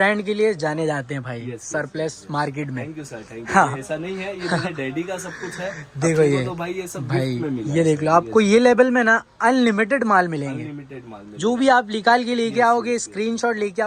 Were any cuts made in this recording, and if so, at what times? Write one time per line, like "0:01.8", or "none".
none